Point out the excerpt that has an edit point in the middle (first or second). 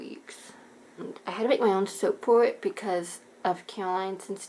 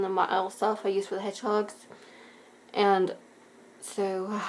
first